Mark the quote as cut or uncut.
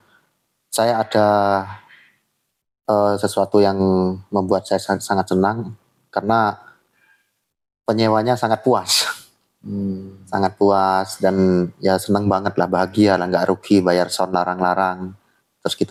uncut